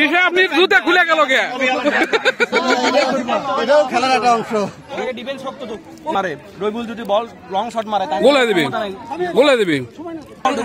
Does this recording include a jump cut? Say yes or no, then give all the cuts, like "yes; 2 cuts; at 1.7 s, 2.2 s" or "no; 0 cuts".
yes; 1 cut; at 4.9 s